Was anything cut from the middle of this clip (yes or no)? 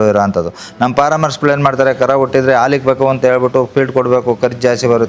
no